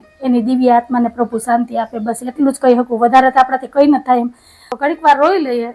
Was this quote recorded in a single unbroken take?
no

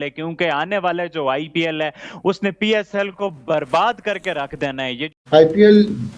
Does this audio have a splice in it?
yes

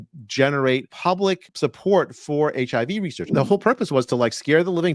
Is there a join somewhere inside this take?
yes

